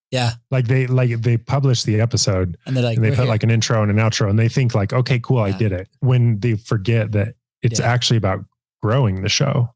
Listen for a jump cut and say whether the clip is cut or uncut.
cut